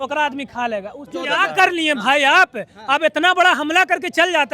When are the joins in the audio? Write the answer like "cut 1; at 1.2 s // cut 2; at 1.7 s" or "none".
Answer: cut 1; at 1.1 s